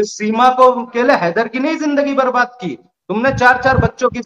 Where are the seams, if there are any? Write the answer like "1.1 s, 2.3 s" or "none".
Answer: 0.9 s